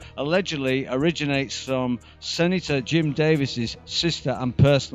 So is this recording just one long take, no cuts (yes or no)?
yes